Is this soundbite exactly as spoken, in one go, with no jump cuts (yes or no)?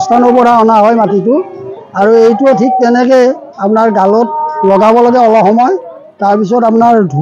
yes